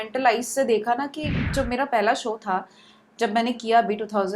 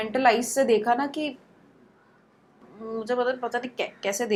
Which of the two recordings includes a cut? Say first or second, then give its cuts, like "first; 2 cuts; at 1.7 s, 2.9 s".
first; 1 cut; at 1.5 s